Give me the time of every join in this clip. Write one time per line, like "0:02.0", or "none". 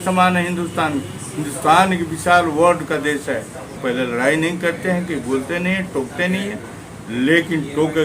0:03.8